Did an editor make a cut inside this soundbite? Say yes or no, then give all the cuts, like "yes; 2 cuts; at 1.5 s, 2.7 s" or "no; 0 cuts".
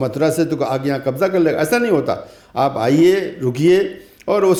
no; 0 cuts